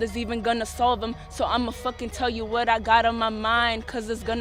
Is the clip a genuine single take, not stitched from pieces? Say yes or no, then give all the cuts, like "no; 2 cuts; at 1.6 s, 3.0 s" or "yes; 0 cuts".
yes; 0 cuts